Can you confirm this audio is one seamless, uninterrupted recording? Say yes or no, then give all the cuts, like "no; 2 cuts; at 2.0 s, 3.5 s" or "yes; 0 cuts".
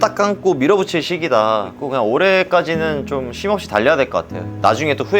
no; 1 cut; at 1.7 s